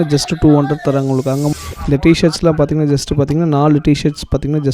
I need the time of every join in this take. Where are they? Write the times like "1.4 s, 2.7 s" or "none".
1.5 s